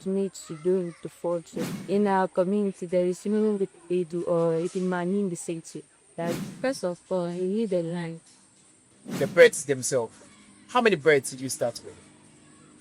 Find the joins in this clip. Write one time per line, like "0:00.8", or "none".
0:01.8
0:06.4
0:09.1